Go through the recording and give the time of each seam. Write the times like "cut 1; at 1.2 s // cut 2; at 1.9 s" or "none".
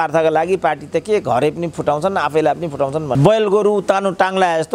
cut 1; at 3.2 s